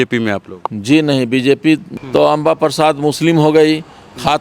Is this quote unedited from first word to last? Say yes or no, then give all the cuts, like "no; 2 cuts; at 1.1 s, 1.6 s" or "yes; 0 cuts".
no; 1 cut; at 1.9 s